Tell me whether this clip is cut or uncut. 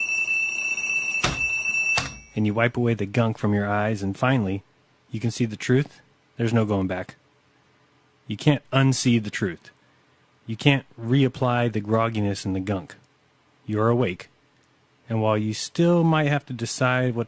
uncut